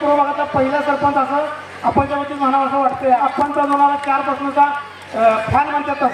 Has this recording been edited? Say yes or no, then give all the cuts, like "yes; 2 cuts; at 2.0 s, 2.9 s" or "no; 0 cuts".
yes; 1 cut; at 3.2 s